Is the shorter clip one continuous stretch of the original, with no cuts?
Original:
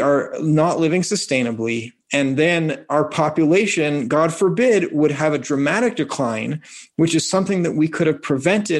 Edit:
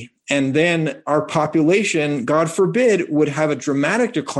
yes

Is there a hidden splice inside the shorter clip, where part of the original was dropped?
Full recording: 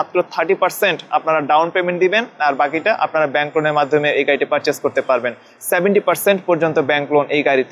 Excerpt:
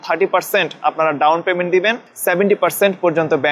yes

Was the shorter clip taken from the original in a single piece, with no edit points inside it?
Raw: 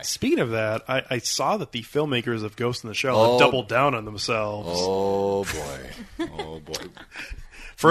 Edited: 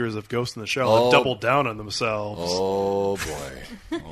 yes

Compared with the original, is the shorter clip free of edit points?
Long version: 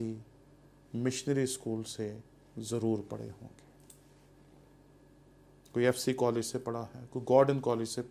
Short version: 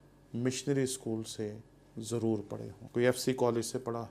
no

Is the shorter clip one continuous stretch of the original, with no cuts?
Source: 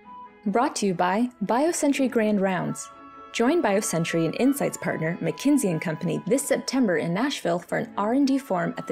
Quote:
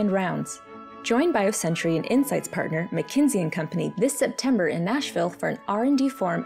yes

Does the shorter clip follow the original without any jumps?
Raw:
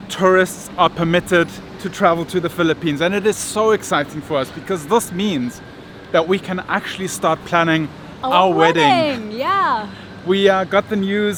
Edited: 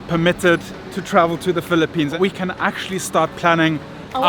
no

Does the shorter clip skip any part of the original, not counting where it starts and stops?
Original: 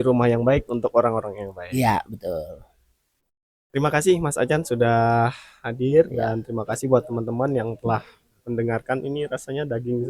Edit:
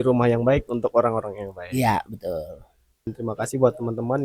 yes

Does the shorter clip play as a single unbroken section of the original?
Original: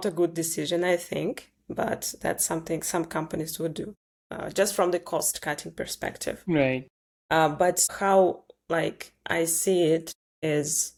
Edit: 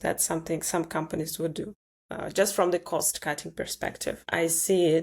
no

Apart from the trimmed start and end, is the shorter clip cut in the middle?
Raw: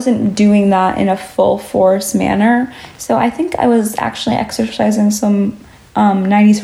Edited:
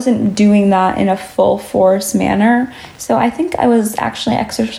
no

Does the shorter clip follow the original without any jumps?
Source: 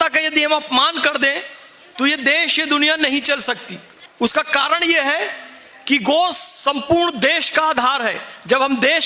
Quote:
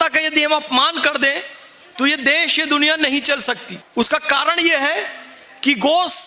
no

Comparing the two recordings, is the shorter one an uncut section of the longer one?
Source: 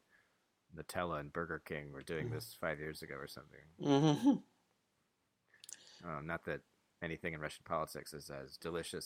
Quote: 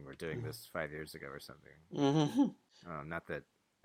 no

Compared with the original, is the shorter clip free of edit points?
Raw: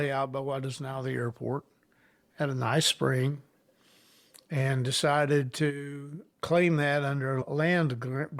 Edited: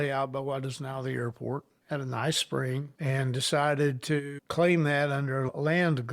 no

